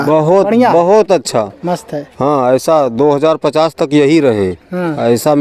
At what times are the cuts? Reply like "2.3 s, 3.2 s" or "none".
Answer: none